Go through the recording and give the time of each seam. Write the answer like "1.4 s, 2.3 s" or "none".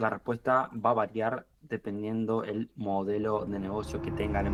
none